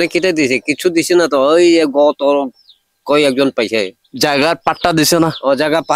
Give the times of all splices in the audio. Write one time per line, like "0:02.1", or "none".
0:04.0